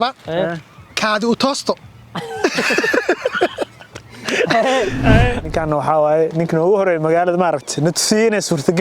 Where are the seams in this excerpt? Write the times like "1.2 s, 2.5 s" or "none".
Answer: 5.5 s